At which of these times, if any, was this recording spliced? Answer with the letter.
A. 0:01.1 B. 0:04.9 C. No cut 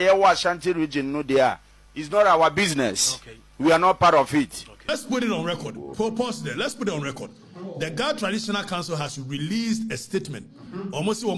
B